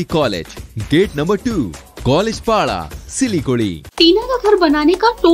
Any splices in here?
yes; 1 cut; at 3.8 s

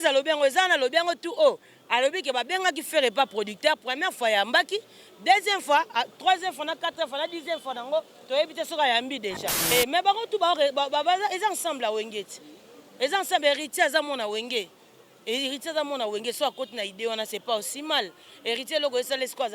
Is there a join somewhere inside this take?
yes; 1 cut; at 9.7 s

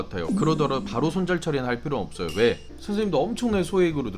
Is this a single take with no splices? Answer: no; 1 cut; at 2.7 s

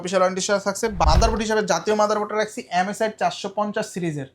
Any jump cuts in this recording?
yes; 1 cut; at 1.0 s

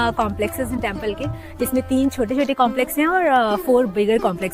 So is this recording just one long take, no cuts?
yes; 0 cuts

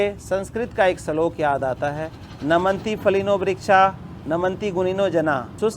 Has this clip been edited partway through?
no; 0 cuts

